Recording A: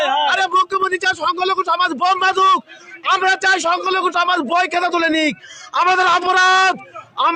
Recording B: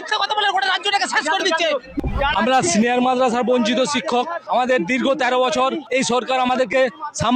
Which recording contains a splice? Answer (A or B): B